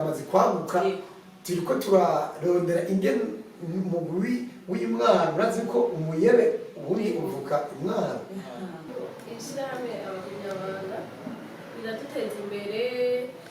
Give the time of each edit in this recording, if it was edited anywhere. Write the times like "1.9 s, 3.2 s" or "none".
8.9 s